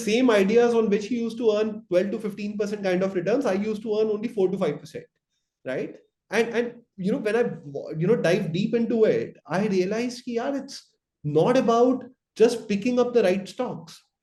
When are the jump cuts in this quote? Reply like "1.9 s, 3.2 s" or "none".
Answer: none